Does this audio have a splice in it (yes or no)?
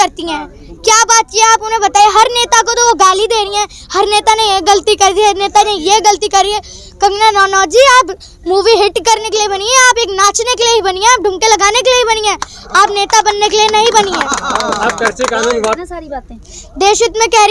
yes